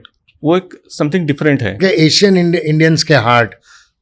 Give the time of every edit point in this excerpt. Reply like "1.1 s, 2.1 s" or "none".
1.8 s